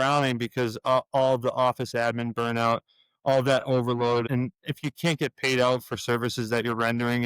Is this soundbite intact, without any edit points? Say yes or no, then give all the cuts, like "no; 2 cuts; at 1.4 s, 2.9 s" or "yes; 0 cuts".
no; 1 cut; at 4.2 s